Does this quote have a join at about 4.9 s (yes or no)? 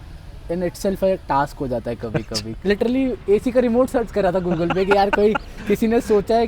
no